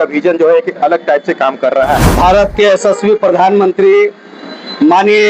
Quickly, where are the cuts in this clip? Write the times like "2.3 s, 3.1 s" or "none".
2.1 s

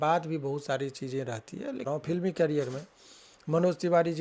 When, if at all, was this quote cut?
1.9 s

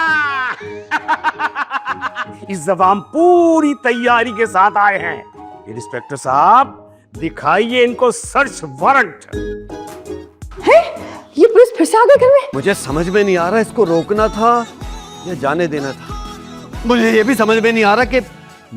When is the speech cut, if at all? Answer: 12.5 s

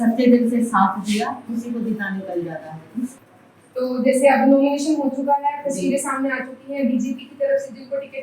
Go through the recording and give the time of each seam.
none

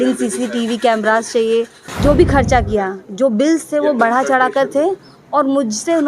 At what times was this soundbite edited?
1.8 s

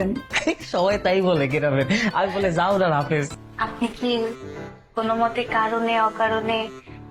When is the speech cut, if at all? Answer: 3.4 s

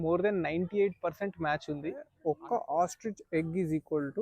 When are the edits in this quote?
2.1 s

